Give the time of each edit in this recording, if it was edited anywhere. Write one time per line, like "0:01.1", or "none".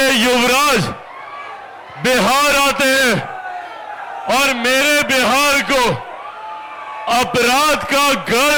none